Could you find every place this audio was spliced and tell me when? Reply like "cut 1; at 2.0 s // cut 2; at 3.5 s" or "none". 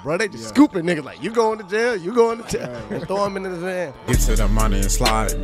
cut 1; at 4.0 s